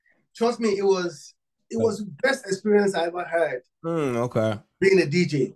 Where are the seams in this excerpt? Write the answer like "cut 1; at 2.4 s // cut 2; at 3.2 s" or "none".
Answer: cut 1; at 4.7 s